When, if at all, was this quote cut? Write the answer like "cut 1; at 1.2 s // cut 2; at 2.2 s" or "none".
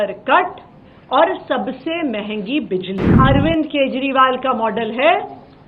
cut 1; at 3.1 s

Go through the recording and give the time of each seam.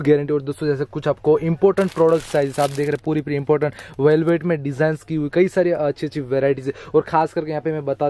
none

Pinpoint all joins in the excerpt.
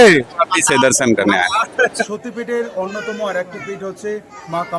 cut 1; at 2.1 s

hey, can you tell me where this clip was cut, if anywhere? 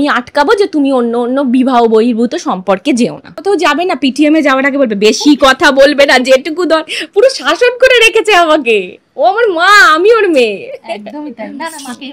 cut 1; at 3.4 s

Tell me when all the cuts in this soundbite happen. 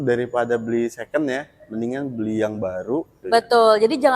cut 1; at 3.2 s

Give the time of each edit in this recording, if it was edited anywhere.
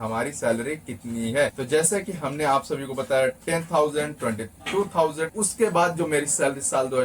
cut 1; at 1.6 s // cut 2; at 5.3 s

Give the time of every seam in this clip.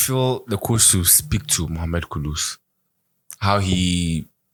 none

